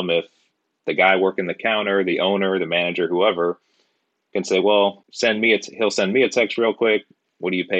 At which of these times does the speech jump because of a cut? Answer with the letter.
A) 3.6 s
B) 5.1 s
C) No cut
B